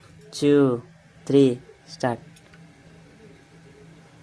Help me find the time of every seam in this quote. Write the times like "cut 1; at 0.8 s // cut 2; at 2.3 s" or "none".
none